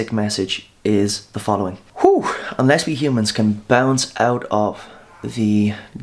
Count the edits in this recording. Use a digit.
1